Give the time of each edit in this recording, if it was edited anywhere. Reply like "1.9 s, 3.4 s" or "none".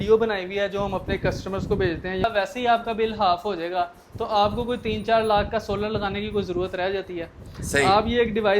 2.2 s

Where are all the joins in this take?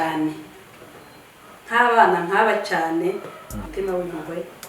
3.7 s

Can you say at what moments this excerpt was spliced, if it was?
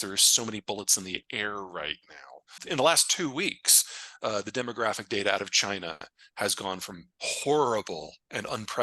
2.6 s

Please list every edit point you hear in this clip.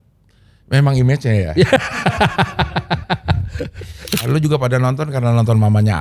4.2 s

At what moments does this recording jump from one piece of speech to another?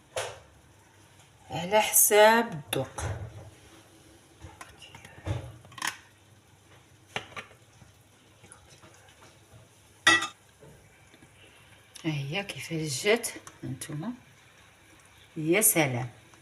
10.2 s

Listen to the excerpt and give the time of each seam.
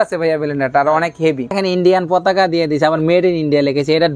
1.6 s

